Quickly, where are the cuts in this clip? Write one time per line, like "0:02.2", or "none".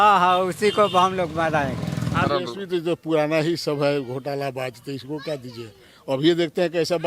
0:02.3